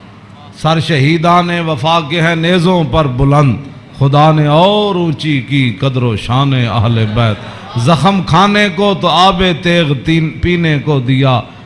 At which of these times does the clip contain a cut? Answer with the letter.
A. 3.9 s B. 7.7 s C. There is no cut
C